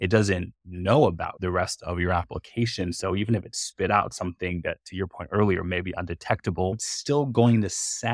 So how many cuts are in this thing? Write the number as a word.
two